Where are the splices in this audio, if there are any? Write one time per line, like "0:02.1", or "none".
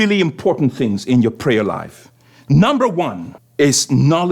0:03.3